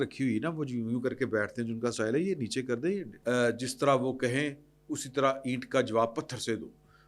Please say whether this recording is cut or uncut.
cut